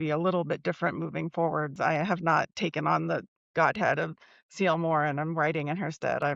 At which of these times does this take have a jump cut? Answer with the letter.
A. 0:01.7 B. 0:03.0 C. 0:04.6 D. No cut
A